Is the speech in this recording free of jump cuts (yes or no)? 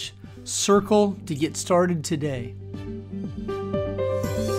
no